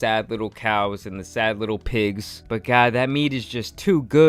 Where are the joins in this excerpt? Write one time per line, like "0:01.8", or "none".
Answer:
none